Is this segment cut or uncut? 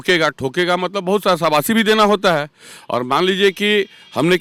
uncut